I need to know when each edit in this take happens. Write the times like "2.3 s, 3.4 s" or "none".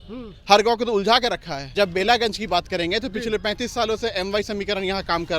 1.7 s